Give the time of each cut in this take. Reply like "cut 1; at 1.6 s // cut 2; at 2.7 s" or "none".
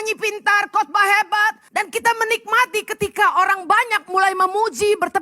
cut 1; at 1.6 s

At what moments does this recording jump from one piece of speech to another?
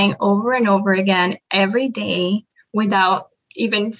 none

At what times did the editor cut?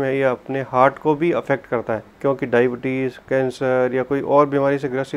cut 1; at 2.1 s

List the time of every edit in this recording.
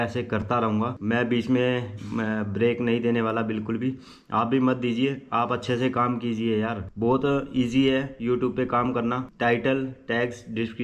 none

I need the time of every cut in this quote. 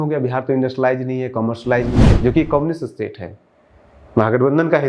cut 1; at 2.1 s

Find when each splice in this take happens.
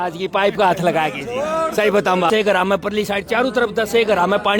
cut 1; at 2.3 s

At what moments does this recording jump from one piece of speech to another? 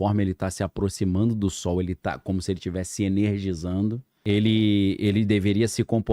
cut 1; at 4.1 s

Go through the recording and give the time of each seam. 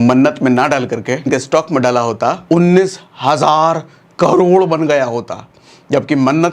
cut 1; at 1.3 s // cut 2; at 2.4 s

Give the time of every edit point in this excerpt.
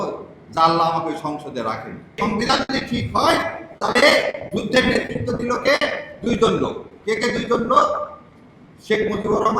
cut 1; at 2.2 s

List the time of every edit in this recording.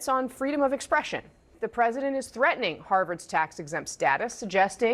cut 1; at 1.6 s

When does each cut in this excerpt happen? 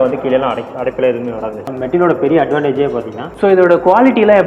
cut 1; at 1.6 s // cut 2; at 3.3 s

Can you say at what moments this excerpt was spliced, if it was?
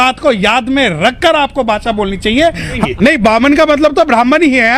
cut 1; at 2.8 s

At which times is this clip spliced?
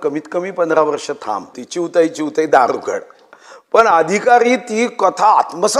cut 1; at 1.6 s

